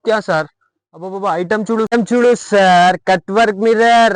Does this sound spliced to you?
yes; 1 cut; at 1.9 s

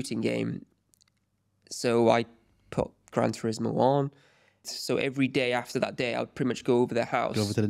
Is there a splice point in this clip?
yes; 1 cut; at 4.7 s

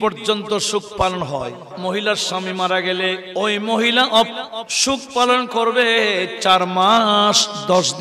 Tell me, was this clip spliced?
yes; 2 cuts; at 1.8 s, 3.2 s

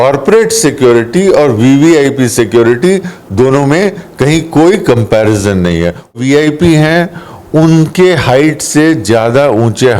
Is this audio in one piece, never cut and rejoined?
no; 1 cut; at 6.2 s

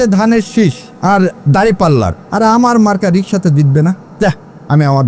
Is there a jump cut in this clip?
yes; 3 cuts; at 0.9 s, 2.2 s, 4.1 s

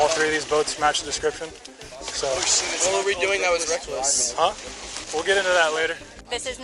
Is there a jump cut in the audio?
no; 0 cuts

